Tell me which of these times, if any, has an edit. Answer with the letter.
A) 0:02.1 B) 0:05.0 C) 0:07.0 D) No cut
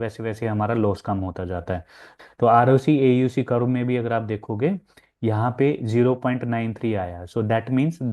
A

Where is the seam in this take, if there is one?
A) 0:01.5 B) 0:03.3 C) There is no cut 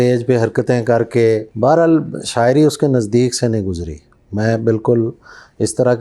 A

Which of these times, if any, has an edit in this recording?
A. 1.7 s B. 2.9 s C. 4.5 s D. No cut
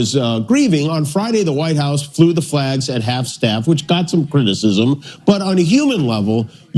B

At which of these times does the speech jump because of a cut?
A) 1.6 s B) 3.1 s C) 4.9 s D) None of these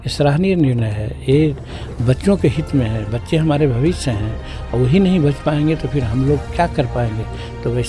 D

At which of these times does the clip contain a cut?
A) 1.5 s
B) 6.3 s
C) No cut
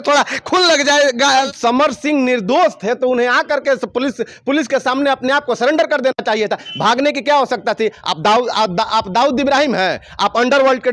A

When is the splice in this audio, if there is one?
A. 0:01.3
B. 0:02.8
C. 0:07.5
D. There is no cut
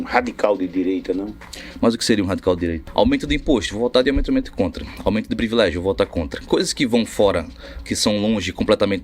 B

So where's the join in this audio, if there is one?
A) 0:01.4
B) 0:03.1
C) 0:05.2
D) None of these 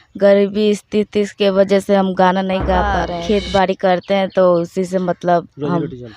B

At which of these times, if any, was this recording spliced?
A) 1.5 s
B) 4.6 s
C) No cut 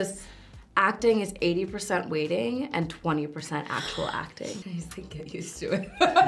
B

